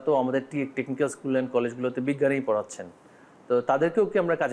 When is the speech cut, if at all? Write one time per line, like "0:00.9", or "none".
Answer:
none